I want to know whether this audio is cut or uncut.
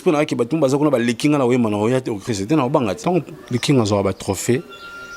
cut